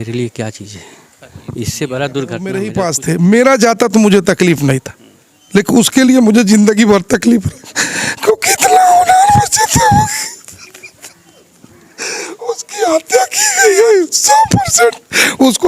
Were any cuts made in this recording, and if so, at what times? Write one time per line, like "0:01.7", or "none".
0:02.7